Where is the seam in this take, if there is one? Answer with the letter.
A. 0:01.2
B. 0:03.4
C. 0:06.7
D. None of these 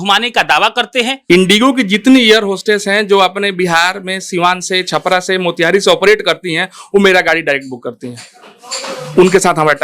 A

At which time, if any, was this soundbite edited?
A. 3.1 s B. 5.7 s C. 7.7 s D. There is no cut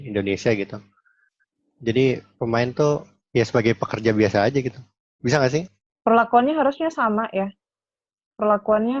B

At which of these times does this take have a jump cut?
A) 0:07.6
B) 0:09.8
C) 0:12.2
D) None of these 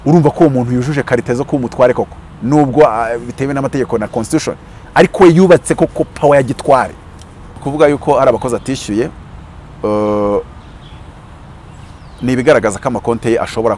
A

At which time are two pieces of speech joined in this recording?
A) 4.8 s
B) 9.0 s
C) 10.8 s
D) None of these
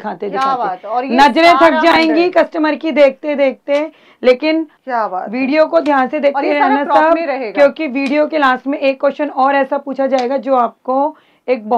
A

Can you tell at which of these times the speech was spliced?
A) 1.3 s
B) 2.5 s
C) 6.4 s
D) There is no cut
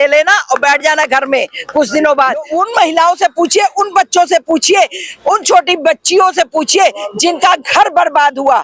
B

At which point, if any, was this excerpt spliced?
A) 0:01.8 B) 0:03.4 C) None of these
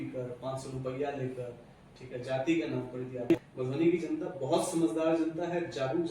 B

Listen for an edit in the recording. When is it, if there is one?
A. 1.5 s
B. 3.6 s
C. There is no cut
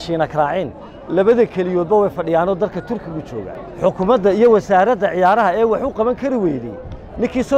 B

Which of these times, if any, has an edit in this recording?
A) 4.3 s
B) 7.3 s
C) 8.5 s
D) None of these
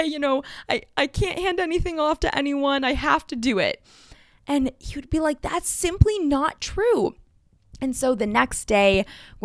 D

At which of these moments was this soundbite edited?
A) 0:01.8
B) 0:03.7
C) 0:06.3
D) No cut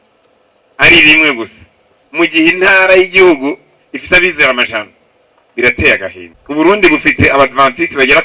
C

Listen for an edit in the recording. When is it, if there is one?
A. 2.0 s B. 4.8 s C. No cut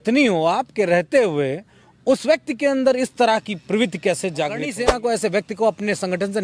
B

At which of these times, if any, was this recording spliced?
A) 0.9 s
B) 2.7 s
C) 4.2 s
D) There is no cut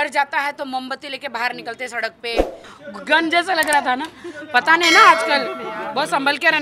B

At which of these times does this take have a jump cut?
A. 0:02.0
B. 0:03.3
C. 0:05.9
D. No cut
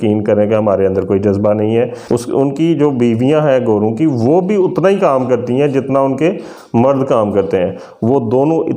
A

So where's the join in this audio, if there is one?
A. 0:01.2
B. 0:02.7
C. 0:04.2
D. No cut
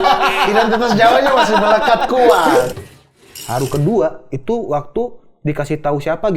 B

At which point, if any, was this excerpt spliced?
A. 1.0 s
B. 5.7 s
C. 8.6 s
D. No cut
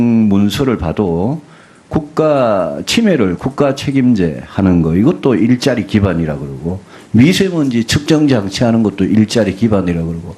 B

